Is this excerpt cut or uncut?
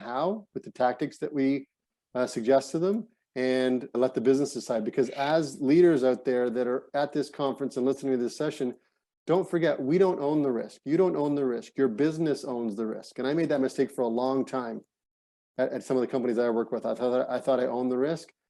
uncut